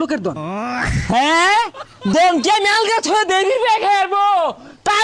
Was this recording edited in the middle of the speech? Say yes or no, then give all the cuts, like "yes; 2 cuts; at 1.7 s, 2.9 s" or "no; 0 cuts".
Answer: no; 0 cuts